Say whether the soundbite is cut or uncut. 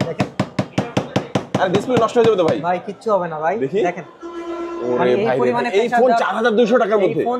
uncut